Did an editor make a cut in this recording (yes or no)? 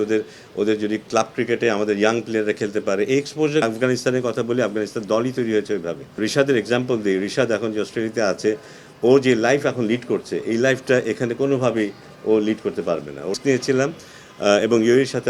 yes